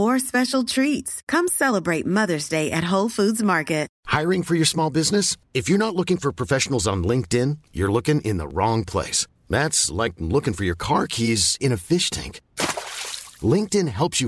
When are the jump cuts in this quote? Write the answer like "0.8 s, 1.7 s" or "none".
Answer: 3.9 s